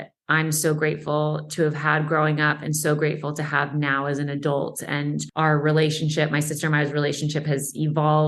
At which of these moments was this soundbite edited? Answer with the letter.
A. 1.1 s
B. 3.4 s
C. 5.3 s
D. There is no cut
C